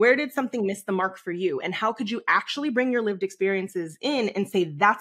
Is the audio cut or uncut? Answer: uncut